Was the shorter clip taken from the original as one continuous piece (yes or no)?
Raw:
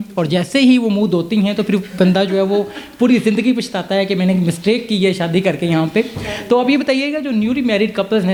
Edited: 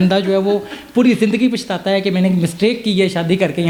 yes